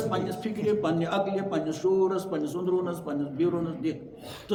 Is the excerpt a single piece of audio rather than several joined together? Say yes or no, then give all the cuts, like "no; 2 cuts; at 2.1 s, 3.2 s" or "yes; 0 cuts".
yes; 0 cuts